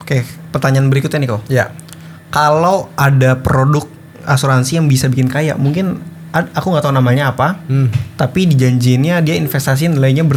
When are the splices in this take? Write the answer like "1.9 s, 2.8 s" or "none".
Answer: none